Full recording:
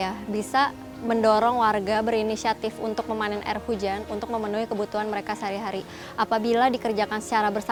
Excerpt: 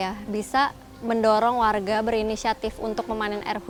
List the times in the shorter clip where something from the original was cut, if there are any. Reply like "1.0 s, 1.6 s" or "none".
none

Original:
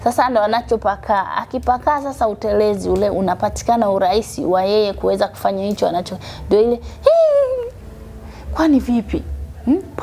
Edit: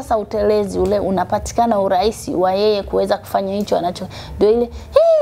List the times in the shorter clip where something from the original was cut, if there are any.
none

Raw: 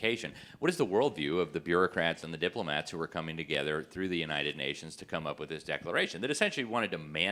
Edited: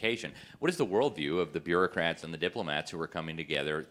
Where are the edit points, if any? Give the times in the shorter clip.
none

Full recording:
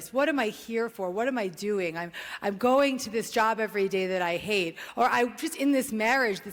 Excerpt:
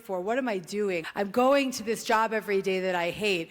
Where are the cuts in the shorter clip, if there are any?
1.1 s

